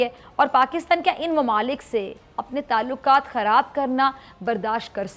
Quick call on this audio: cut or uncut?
uncut